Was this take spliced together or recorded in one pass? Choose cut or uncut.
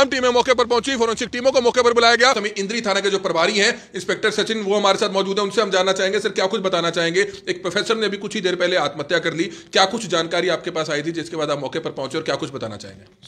cut